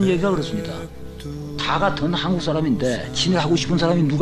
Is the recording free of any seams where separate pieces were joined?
yes; 0 cuts

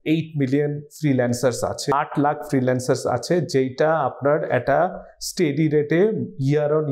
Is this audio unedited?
yes; 0 cuts

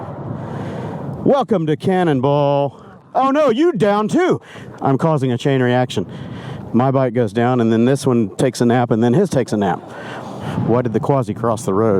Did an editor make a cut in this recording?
yes; 2 cuts; at 4.6 s, 10.4 s

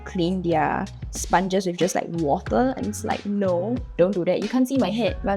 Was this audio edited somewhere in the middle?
no; 0 cuts

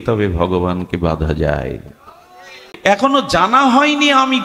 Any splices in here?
yes; 1 cut; at 2.6 s

